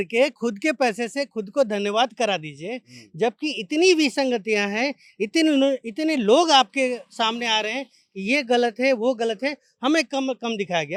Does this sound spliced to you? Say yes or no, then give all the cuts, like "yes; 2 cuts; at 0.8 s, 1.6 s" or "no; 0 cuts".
no; 0 cuts